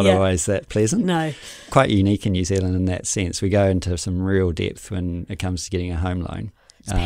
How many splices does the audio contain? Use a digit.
1